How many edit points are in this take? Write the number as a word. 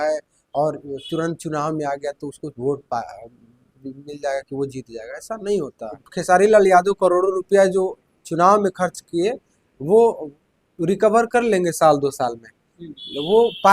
one